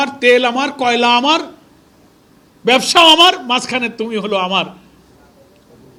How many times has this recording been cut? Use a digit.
0